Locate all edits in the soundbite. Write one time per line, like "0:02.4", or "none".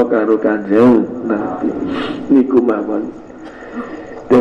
none